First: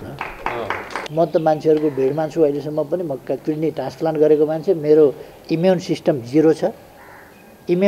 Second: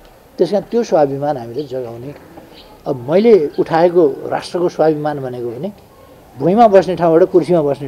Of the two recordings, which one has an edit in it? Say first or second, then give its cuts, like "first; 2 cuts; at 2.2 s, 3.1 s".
first; 1 cut; at 1.0 s